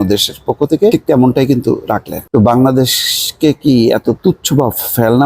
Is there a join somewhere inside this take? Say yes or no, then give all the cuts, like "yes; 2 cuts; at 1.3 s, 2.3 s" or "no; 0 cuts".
yes; 2 cuts; at 0.9 s, 2.1 s